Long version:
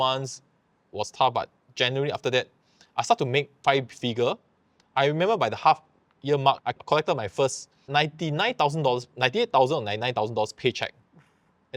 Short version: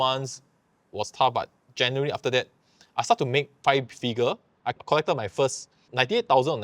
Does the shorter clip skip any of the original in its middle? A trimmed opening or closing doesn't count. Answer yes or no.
yes